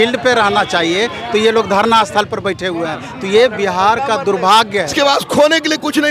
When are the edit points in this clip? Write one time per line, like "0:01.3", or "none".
0:04.9